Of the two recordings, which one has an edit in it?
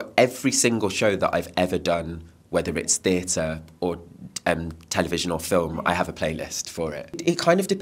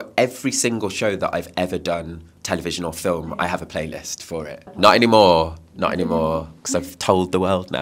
second; 2 cuts; at 2.3 s, 4.7 s

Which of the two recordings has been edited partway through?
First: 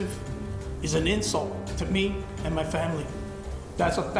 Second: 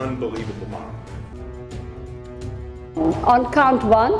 second; 1 cut; at 1.3 s

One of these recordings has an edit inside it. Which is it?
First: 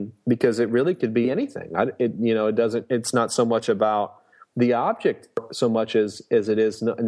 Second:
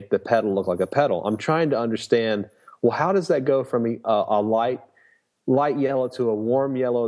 first; 1 cut; at 5.4 s

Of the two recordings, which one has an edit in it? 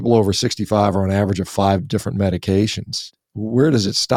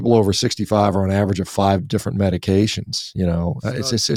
first; 1 cut; at 3.1 s

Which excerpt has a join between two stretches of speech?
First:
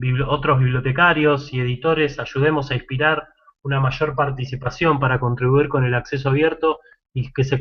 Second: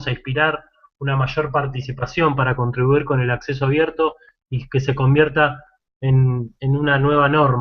first; 1 cut; at 1.2 s

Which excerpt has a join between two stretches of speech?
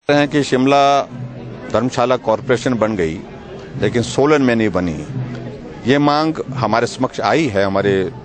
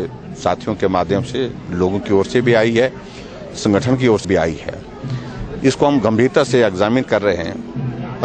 second; 1 cut; at 4.3 s

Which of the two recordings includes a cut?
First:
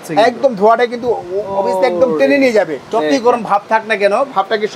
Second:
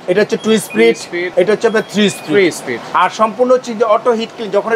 second; 1 cut; at 1.2 s

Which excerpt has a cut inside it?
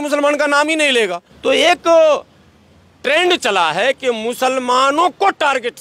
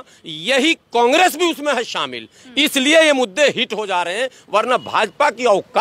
first; 1 cut; at 0.9 s

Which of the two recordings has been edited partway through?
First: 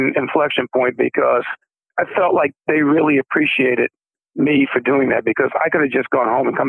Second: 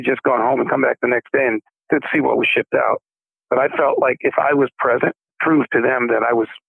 second; 2 cuts; at 1.7 s, 5.3 s

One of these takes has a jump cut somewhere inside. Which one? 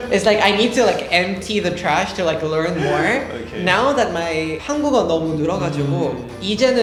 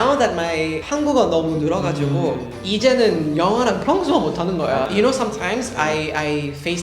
second; 1 cut; at 4.8 s

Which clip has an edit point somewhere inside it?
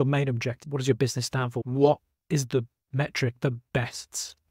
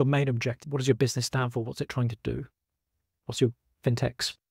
first; 1 cut; at 1.7 s

